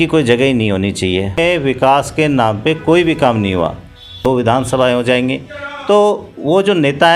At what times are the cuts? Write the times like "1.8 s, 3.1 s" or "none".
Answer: 1.4 s, 4.1 s